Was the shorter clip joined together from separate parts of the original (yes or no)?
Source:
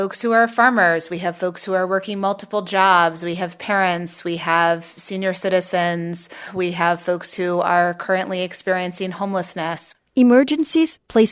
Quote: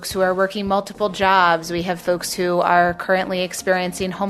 yes